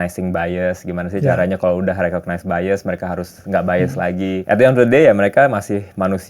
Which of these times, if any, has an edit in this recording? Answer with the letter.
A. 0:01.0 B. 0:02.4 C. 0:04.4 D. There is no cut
C